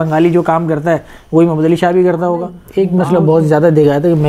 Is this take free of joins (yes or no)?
no